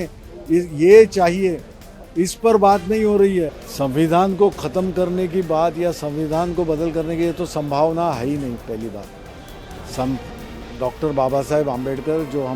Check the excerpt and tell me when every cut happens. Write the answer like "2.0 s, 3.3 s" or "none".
3.6 s

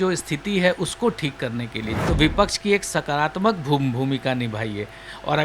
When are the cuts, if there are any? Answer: 1.9 s

